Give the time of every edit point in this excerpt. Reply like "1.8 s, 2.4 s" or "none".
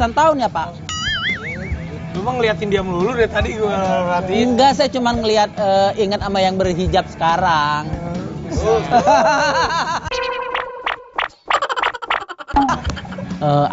2.9 s

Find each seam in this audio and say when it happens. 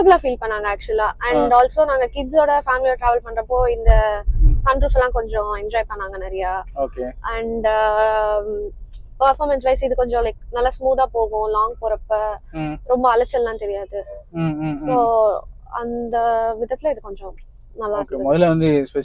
none

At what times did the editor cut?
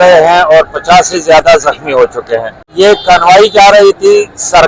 2.7 s

